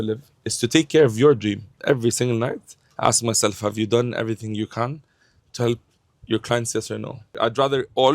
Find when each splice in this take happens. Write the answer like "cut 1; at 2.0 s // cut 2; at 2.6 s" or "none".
cut 1; at 1.8 s // cut 2; at 7.3 s